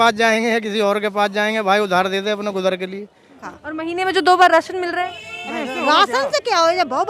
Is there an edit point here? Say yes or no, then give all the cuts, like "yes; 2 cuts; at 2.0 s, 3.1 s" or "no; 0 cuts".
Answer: yes; 1 cut; at 3.4 s